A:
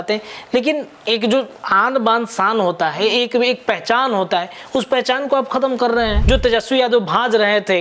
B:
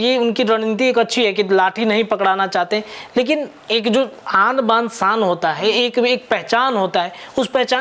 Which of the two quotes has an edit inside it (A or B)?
A